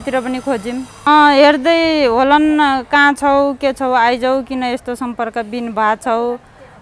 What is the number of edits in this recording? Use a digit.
1